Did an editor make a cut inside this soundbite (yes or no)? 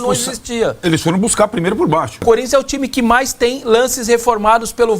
yes